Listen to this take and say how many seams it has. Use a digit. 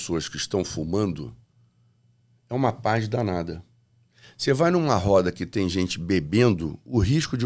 0